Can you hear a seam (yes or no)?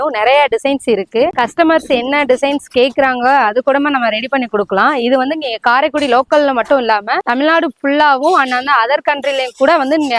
no